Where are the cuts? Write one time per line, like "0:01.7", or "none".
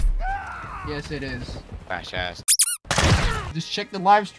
0:03.4